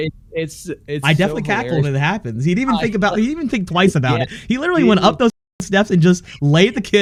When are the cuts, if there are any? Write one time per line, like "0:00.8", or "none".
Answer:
none

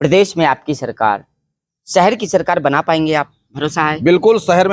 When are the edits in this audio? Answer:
none

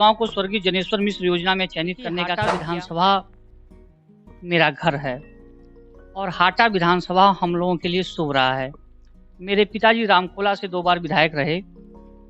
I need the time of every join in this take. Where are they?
0:02.4

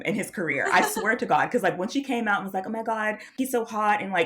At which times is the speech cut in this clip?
0:03.3

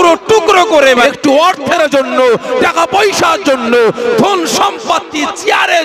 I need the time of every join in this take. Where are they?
0:01.0

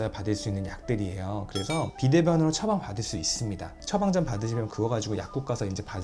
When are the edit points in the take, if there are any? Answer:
none

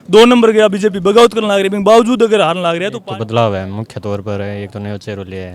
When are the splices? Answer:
0:03.0

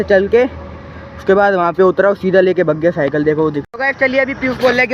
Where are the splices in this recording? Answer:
0:03.7

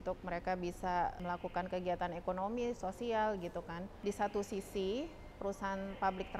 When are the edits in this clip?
0:01.2
0:03.9
0:05.2

